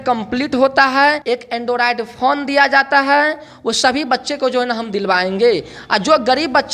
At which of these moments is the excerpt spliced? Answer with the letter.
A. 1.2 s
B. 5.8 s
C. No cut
A